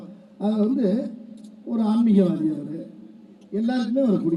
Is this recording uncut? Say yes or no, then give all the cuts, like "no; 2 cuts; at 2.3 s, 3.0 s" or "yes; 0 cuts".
yes; 0 cuts